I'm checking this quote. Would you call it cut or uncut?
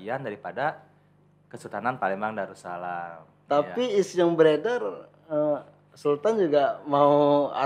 uncut